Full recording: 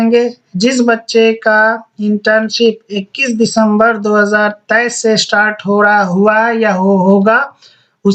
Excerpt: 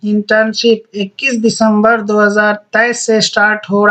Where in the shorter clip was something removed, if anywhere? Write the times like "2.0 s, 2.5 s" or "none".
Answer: none